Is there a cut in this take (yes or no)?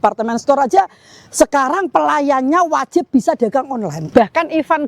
yes